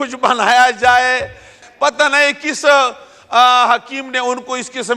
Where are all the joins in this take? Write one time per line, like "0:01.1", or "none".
0:01.6